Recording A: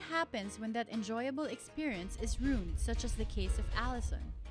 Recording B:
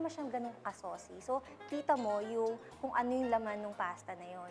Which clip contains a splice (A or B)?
B